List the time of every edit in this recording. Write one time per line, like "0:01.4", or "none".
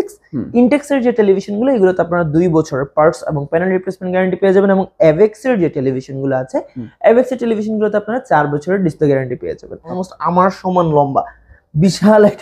0:10.0